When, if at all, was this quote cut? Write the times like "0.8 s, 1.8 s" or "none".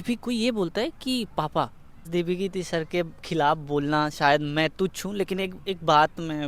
2.1 s